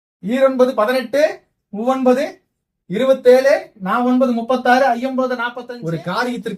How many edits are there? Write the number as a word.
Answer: one